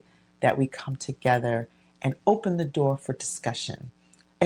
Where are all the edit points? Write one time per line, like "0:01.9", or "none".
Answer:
none